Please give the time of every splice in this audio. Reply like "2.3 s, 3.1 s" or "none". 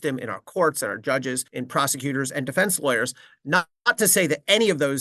1.5 s